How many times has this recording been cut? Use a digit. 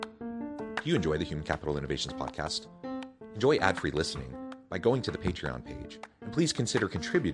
0